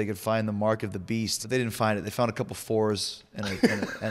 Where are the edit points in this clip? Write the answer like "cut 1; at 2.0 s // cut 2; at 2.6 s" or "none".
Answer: cut 1; at 1.4 s